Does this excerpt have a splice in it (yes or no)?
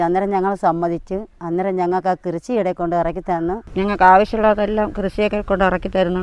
yes